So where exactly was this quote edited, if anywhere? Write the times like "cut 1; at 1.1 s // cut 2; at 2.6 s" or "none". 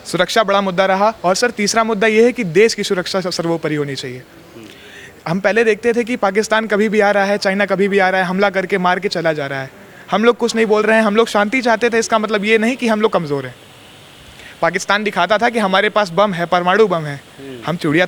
none